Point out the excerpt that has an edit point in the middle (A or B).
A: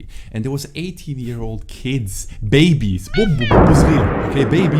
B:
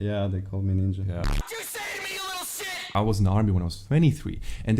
B